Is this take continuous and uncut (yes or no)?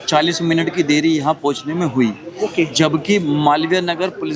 yes